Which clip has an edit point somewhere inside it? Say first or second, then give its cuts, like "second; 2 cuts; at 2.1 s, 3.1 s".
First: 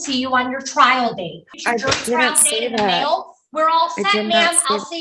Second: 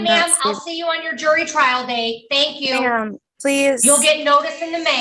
first; 1 cut; at 1.5 s